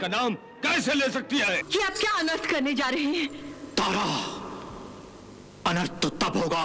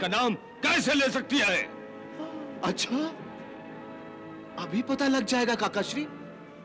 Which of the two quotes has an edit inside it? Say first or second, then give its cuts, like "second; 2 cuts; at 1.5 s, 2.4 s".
first; 1 cut; at 1.6 s